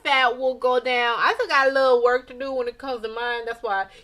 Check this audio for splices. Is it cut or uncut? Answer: uncut